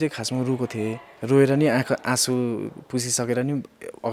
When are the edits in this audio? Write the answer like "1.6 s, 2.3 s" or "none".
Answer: none